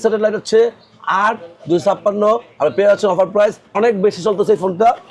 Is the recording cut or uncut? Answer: cut